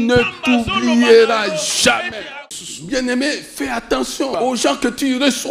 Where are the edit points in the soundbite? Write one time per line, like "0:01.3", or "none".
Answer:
0:02.3
0:04.3